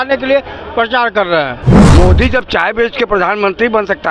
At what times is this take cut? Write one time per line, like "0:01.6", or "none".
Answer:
0:01.8